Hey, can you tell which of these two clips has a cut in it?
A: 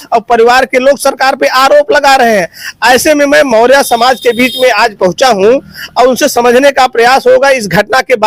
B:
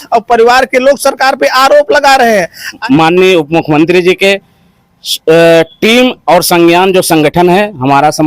B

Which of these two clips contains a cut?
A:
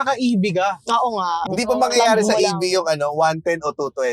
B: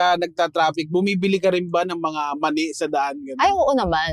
A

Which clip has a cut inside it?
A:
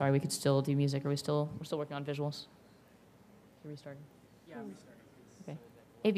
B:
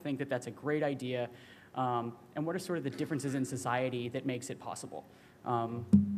B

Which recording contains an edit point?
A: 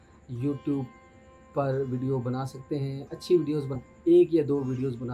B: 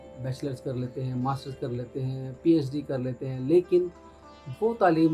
A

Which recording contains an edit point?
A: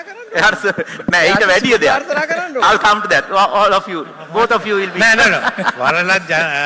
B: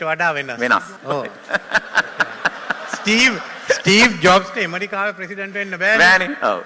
B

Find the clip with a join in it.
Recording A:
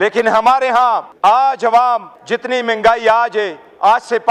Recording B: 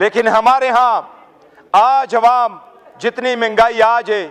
A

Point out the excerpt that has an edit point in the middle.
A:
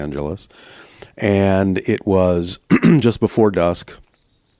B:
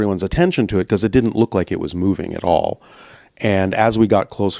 A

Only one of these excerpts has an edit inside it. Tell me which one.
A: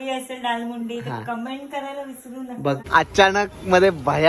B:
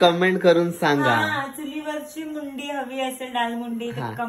A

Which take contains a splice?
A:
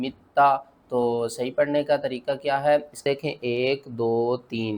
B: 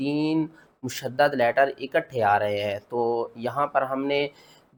A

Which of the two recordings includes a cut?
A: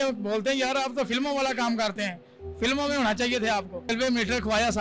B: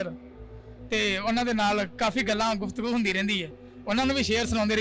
A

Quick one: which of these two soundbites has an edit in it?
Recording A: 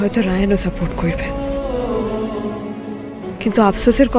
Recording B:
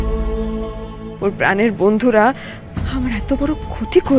B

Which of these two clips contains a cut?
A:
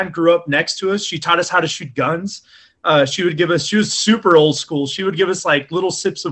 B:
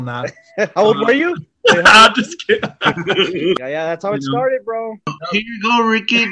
B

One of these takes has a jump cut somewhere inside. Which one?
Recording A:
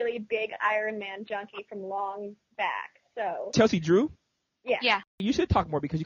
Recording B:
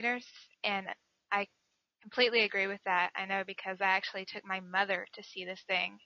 A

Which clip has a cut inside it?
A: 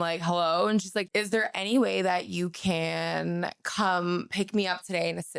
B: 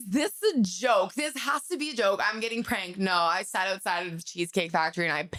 A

